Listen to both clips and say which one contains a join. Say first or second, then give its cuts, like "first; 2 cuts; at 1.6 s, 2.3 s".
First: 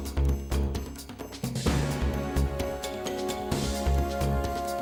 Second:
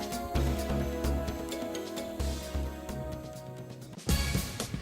second; 1 cut; at 3.1 s